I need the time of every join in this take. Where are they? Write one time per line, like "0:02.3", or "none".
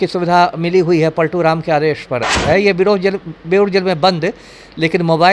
0:02.3